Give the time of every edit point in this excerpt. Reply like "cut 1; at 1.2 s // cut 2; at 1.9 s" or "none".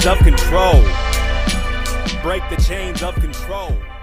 none